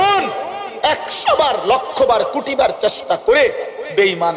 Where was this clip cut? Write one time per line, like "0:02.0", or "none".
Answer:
none